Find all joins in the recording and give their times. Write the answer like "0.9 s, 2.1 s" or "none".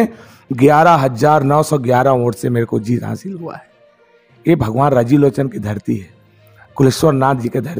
none